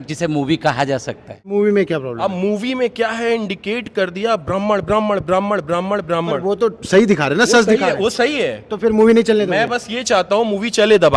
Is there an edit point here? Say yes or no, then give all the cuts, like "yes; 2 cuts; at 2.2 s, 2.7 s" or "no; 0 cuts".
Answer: yes; 1 cut; at 1.3 s